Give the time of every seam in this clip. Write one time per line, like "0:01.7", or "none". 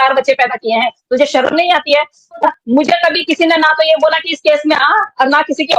0:02.5

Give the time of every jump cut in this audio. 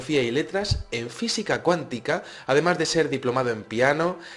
0:01.4

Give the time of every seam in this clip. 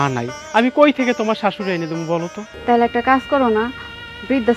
0:02.4

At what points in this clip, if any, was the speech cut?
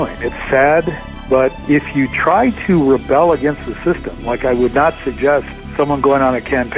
0:01.6
0:05.6

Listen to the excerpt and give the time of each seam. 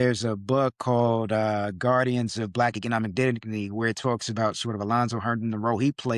none

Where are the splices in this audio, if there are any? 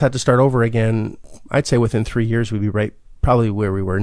0:01.3

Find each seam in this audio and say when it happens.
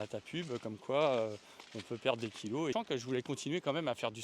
0:02.7

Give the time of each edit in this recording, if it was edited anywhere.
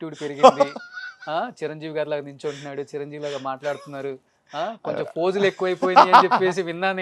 none

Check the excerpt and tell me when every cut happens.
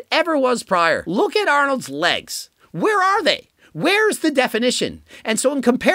0:01.0

